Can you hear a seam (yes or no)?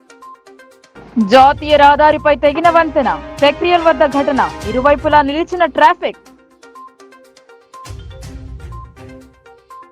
no